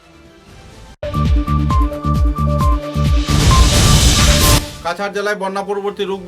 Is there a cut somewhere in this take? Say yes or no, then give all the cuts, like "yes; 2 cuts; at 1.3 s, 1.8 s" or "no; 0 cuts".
yes; 1 cut; at 4.7 s